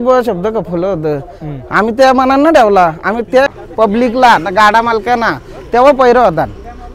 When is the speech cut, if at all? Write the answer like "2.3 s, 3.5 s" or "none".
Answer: 3.5 s